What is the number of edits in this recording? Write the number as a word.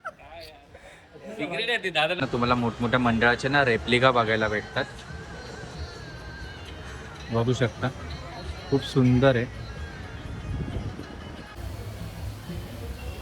two